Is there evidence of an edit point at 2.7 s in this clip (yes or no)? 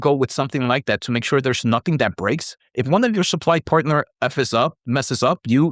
no